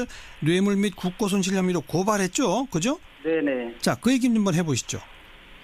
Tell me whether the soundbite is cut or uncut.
uncut